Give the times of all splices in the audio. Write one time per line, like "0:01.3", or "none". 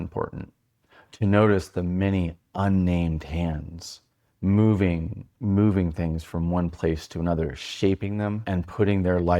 0:08.4